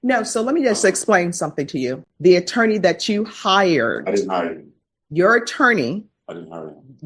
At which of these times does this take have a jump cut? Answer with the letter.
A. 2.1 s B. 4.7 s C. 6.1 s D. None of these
A